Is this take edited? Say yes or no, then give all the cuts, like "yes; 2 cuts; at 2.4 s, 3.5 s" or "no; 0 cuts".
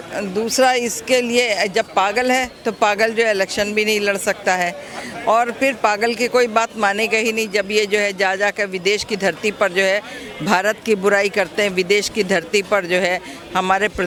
no; 0 cuts